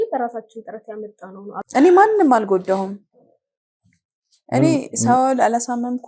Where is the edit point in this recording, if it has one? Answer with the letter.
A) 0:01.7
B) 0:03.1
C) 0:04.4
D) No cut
A